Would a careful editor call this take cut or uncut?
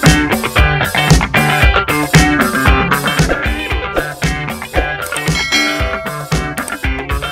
uncut